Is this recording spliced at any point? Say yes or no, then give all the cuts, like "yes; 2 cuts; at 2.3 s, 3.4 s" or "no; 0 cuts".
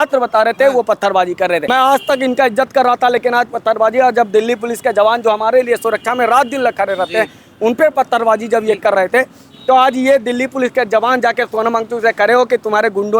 yes; 1 cut; at 1.7 s